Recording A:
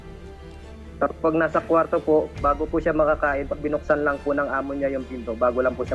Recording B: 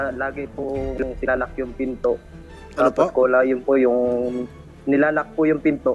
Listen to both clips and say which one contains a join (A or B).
A